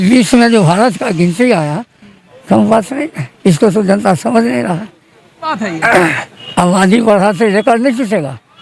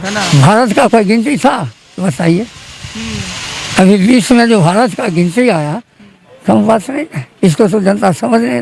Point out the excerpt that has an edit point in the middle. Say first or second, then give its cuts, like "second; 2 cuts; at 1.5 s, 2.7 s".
first; 1 cut; at 5.5 s